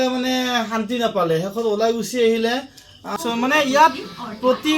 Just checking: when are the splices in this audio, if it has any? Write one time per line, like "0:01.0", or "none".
0:03.2